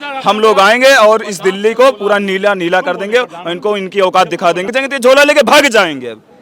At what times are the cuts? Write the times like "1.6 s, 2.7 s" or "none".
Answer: 4.7 s

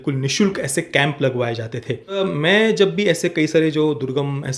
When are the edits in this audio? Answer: 2.2 s

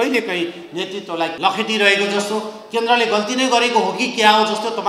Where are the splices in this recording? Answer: 1.3 s

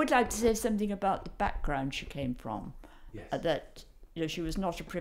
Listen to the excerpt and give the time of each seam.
none

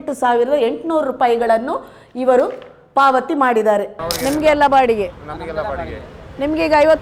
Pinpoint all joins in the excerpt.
4.0 s

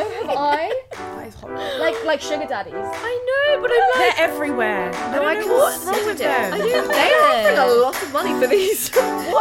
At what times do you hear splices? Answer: none

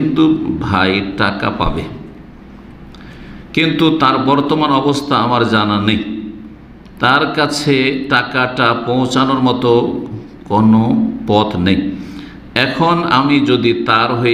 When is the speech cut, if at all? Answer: none

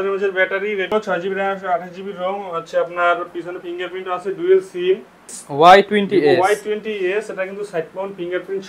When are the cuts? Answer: 0.9 s, 5.4 s

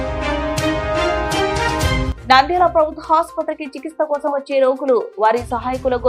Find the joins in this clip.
2.1 s

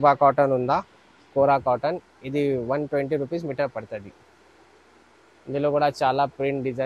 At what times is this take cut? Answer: none

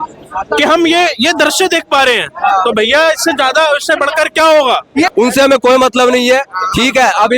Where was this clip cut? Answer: 5.1 s

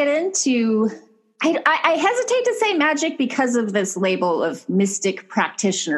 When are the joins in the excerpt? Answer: none

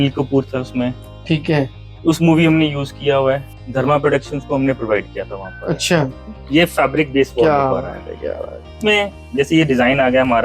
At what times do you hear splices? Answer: 3.5 s, 6.2 s, 8.8 s

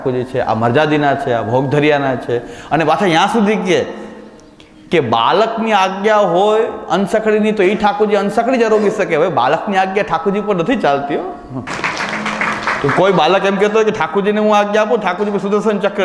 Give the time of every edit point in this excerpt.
11.7 s

